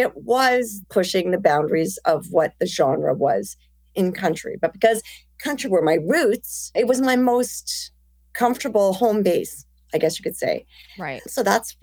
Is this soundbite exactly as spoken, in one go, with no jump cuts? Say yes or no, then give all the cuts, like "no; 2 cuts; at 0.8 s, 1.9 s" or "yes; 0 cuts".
yes; 0 cuts